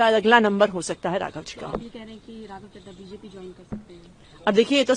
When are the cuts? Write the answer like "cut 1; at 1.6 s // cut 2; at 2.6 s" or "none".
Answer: none